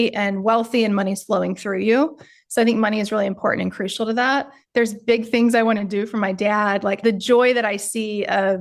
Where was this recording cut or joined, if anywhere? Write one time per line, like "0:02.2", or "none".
0:04.5

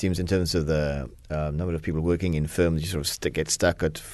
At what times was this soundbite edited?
none

